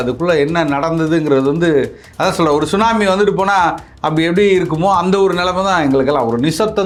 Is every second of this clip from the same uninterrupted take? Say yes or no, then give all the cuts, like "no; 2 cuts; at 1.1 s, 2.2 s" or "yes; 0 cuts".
yes; 0 cuts